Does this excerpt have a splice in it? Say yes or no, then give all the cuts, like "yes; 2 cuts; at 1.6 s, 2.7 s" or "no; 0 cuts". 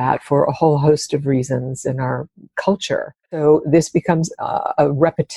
yes; 1 cut; at 3.4 s